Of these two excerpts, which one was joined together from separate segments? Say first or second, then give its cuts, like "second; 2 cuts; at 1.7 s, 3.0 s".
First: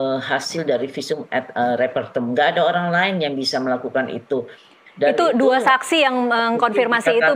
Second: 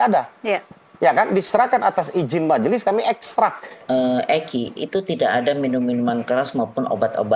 second; 1 cut; at 3.8 s